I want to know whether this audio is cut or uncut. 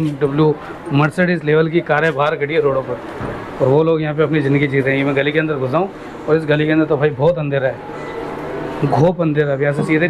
uncut